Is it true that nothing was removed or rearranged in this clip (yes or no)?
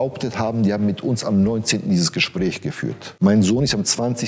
no